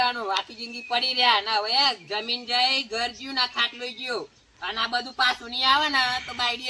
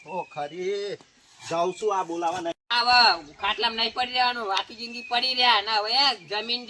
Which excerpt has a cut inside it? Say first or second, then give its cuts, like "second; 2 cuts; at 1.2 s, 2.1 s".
second; 1 cut; at 2.6 s